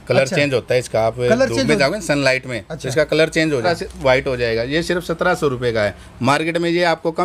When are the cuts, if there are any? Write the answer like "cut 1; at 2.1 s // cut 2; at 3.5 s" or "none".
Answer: none